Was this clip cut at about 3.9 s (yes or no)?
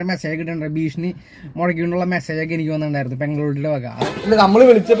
yes